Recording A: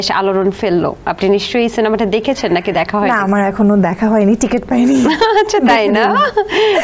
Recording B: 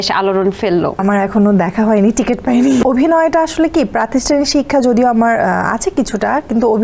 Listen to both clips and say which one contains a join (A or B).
B